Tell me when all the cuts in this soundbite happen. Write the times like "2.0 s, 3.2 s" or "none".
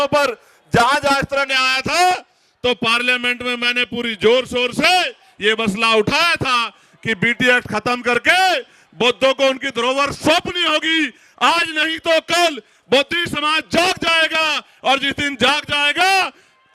1.5 s